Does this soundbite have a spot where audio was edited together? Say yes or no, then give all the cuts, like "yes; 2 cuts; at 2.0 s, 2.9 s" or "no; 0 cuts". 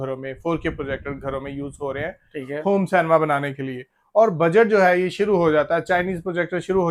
no; 0 cuts